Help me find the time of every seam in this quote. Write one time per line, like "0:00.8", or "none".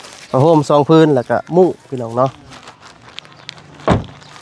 none